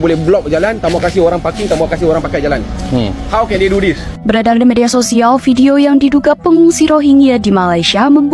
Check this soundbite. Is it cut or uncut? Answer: cut